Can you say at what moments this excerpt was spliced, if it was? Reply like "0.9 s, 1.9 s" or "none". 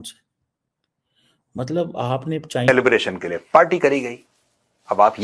2.7 s